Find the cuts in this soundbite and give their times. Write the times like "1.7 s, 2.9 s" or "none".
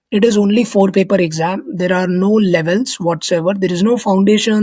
none